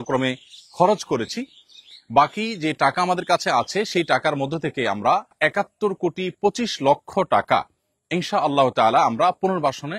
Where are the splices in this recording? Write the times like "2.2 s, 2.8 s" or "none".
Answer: 5.3 s